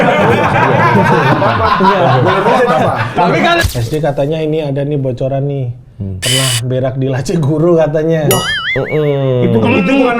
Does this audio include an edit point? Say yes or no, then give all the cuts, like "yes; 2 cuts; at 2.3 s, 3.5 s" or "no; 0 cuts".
yes; 1 cut; at 3.6 s